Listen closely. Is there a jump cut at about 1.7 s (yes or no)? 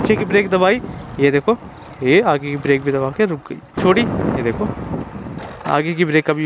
no